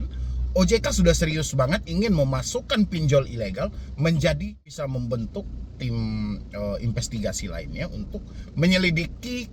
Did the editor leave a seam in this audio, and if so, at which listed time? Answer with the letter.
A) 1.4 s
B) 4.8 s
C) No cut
B